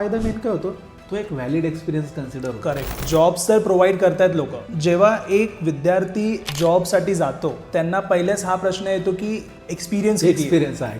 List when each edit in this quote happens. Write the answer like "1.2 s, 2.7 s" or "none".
3.0 s, 4.7 s, 6.5 s, 7.6 s